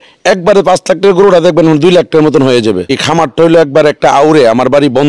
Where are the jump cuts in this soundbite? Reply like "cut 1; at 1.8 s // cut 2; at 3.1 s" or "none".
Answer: cut 1; at 2.8 s